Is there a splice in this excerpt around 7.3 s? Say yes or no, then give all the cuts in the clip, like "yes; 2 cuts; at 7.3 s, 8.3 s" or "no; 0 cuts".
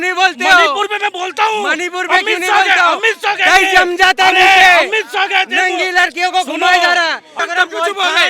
yes; 1 cut; at 7.3 s